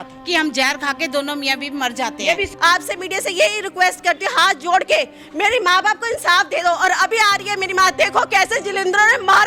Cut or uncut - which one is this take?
cut